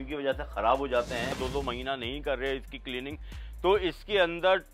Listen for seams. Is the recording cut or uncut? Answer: cut